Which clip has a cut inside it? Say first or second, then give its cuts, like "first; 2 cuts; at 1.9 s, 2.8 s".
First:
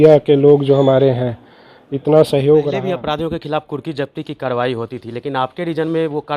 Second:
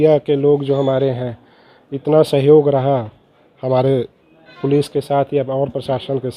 first; 1 cut; at 2.8 s